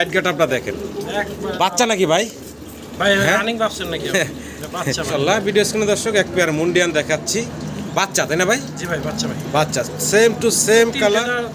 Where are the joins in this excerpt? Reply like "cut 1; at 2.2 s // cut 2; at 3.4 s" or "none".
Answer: cut 1; at 5.0 s

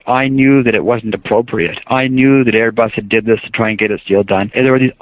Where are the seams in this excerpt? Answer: none

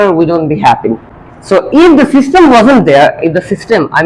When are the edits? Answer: cut 1; at 1.1 s

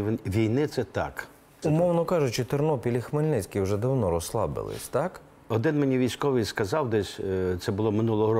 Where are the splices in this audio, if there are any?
cut 1; at 1.6 s // cut 2; at 5.5 s

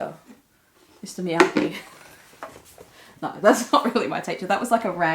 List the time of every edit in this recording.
none

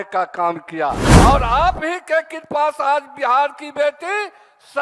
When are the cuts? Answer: cut 1; at 1.1 s

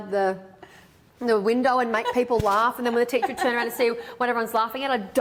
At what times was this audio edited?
none

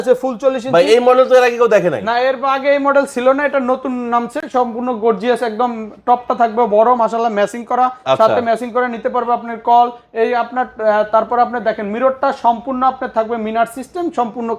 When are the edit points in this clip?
none

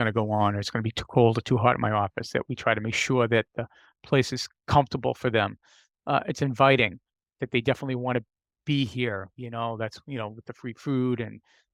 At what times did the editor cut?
none

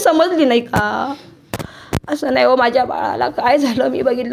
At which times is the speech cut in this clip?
none

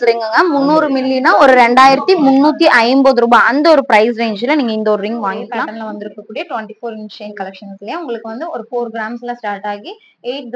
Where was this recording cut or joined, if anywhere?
cut 1; at 5.7 s

